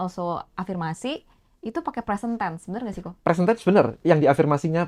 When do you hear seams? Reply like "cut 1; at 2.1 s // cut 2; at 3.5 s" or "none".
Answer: none